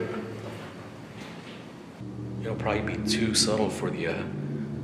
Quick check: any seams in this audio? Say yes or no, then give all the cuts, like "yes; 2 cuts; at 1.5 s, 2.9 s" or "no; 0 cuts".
yes; 1 cut; at 2.0 s